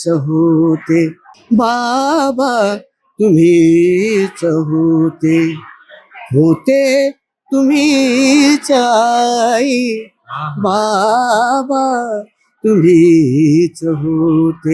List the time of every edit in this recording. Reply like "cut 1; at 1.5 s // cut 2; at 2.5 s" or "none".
cut 1; at 1.3 s